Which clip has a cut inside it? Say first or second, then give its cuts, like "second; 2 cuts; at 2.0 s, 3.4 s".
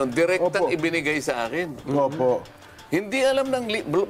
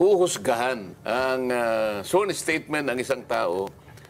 second; 1 cut; at 0.9 s